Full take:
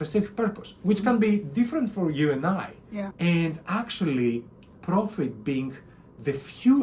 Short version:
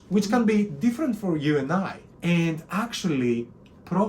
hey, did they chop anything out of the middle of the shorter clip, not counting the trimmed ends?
yes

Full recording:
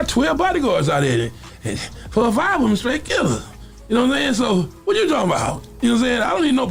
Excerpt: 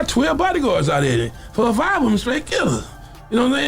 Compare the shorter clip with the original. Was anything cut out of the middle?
yes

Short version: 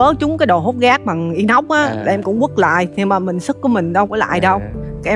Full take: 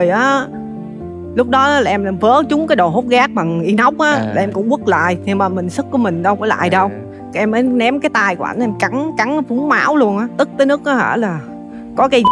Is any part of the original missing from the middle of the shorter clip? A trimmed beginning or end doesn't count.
no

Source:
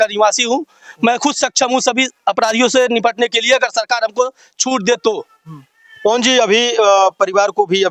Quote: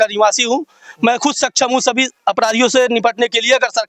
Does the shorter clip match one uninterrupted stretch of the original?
yes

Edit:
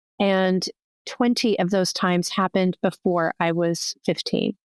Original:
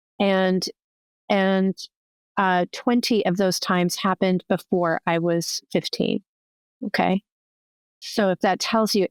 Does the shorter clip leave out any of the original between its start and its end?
yes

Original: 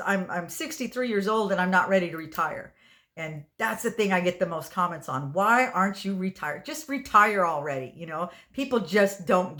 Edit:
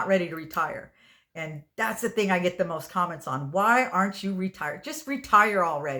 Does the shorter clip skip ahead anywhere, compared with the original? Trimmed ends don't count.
no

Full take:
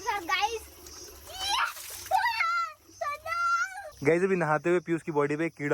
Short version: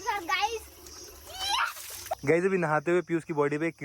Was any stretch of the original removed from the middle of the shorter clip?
yes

